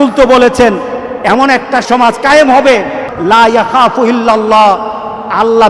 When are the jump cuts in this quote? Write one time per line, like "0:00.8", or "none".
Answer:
0:03.1